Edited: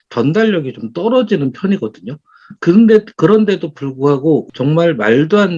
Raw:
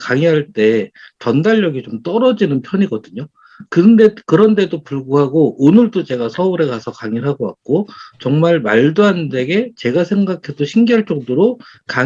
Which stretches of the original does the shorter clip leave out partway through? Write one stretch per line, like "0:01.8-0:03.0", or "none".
0:05.5-0:08.1